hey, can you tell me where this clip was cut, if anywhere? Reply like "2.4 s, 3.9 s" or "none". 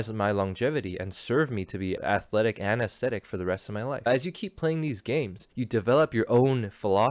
2.0 s, 4.1 s, 5.4 s